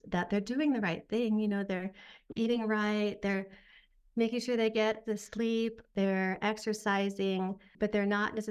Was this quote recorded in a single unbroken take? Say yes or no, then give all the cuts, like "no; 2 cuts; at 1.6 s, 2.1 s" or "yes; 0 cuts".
no; 2 cuts; at 5.9 s, 7.7 s